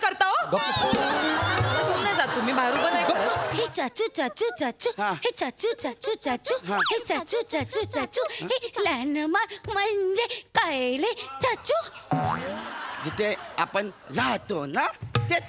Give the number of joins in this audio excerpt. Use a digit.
1